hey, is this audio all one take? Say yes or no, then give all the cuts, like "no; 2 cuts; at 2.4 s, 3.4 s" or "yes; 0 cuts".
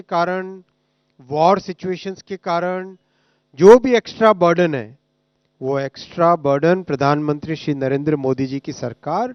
yes; 0 cuts